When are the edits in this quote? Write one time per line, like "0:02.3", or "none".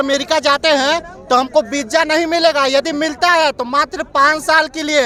none